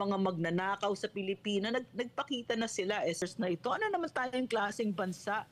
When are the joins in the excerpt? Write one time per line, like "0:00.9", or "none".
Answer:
0:03.2